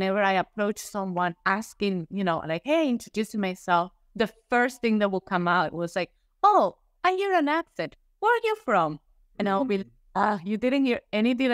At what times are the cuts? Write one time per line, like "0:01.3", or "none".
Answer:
none